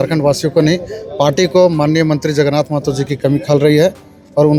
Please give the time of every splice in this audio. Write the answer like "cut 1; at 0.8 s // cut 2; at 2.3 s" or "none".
none